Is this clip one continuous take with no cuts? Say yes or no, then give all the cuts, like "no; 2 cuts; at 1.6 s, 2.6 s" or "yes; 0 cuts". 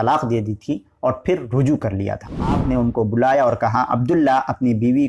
no; 1 cut; at 2.6 s